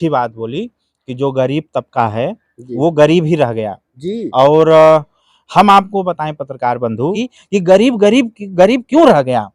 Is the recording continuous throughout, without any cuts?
no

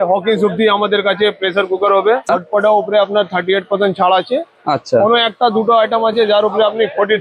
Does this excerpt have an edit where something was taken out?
yes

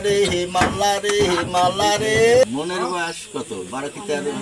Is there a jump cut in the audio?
yes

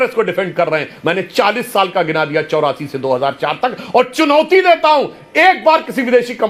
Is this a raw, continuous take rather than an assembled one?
yes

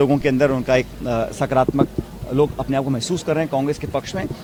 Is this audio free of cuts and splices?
yes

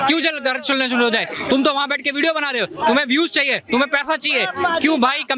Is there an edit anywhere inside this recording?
no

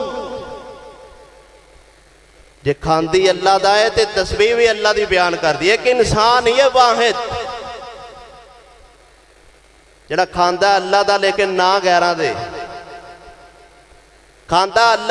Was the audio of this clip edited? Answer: no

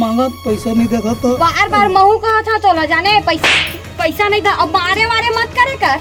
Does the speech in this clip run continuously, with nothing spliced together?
yes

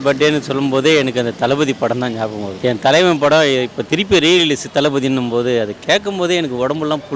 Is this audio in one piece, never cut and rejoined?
yes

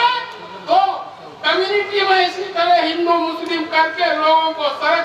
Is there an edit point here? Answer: no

